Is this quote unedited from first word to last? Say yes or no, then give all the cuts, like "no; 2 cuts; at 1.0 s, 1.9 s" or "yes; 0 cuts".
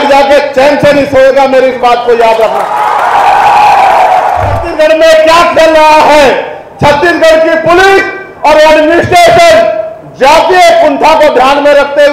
no; 1 cut; at 4.6 s